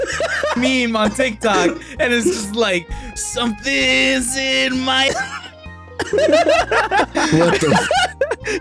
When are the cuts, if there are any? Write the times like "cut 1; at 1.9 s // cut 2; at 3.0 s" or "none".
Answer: none